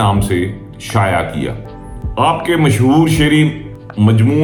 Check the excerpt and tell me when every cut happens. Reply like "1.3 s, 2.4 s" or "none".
none